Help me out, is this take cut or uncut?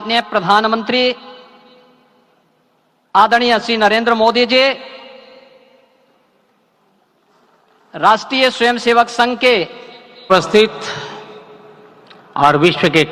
cut